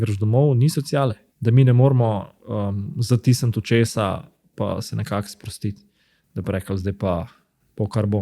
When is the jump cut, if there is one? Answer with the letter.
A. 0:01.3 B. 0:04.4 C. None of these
A